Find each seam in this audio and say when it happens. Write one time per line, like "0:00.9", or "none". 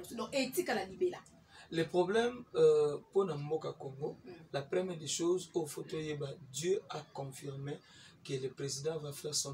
none